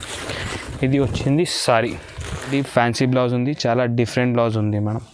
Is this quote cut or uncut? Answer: cut